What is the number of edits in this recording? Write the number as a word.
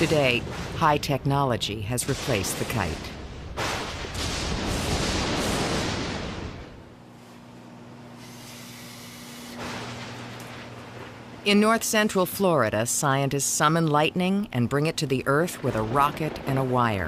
one